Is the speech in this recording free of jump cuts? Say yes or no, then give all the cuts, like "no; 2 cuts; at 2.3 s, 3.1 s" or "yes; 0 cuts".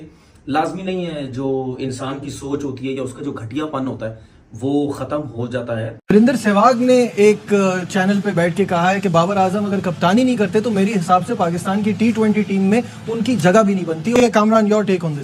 no; 2 cuts; at 5.9 s, 14.1 s